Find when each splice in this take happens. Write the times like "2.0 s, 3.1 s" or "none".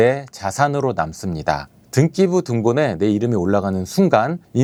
none